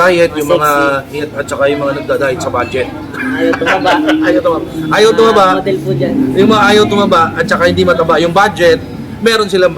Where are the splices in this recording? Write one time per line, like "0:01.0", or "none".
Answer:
0:01.3